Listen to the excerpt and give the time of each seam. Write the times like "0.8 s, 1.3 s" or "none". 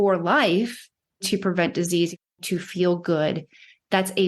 1.2 s, 2.4 s